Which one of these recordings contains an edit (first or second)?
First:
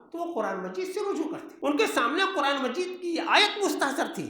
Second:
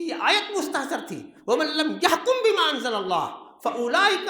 first